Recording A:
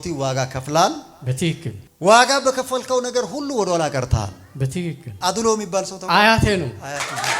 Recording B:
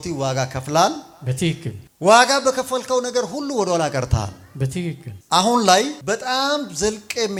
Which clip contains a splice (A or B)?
A